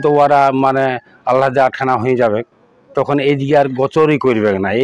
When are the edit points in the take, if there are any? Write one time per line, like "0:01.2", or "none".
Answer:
none